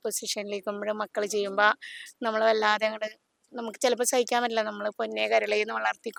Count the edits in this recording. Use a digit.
0